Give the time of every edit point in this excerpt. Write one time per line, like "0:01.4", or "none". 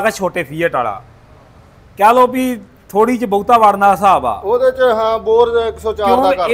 none